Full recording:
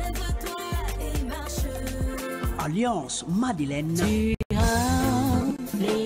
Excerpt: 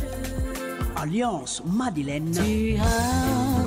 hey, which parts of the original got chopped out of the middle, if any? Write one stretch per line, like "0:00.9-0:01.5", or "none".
0:04.4-0:04.5